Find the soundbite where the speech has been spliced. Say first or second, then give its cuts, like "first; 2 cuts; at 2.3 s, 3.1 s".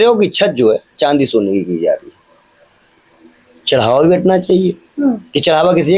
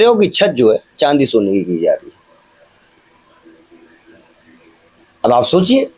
first; 1 cut; at 3.1 s